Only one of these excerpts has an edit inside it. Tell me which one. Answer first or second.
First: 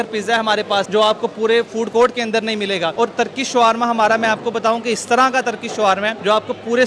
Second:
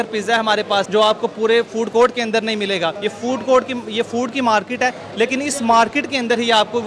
first